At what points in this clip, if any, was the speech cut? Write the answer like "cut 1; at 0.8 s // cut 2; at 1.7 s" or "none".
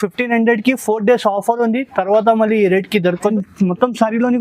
cut 1; at 3.2 s